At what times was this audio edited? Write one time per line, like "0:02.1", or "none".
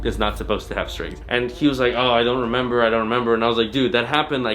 0:01.2